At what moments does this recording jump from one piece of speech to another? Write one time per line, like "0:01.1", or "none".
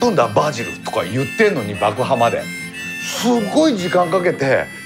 none

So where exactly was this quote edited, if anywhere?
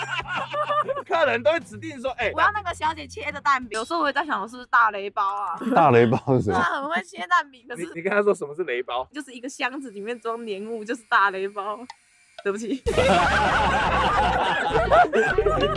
none

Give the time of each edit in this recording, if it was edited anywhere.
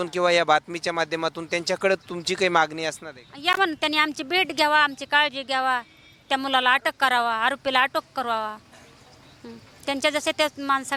none

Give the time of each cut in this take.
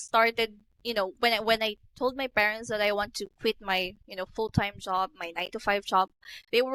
none

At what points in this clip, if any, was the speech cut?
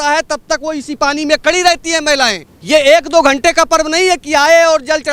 0:02.5

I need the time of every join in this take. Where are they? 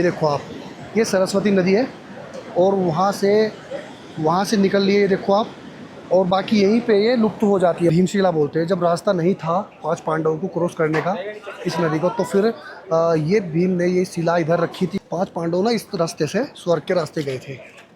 0:07.9
0:15.0

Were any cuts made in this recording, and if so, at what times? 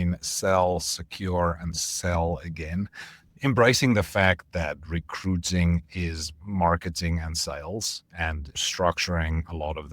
0:03.3
0:08.6

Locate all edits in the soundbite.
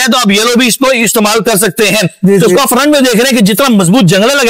0:02.1

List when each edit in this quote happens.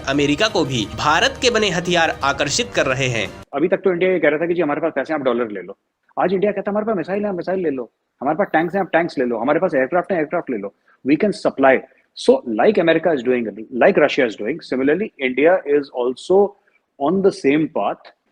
0:03.3

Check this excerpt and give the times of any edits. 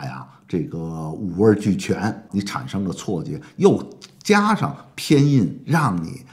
0:02.2

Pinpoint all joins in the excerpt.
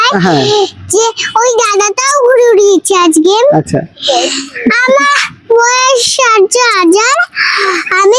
none

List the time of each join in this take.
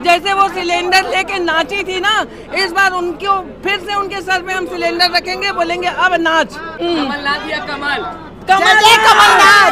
0:06.7

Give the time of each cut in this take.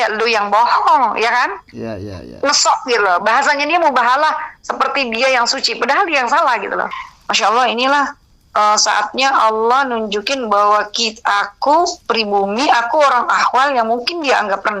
0:06.9

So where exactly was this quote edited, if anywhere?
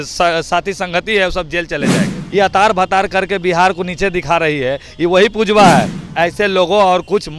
0:02.1
0:06.0

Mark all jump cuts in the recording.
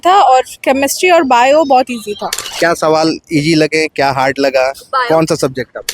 0:02.4

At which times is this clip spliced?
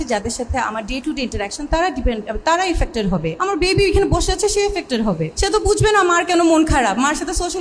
0:03.3
0:05.3

